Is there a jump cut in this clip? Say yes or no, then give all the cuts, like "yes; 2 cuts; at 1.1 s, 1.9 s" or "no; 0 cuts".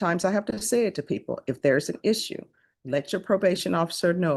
no; 0 cuts